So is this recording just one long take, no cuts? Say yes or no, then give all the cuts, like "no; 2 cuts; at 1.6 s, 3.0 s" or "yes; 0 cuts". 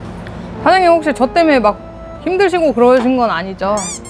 yes; 0 cuts